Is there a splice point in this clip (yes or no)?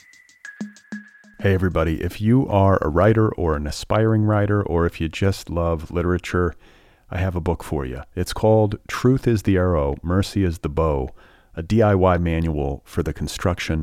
yes